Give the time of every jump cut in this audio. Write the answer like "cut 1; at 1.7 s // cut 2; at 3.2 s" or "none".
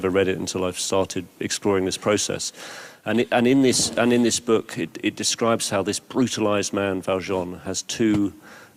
none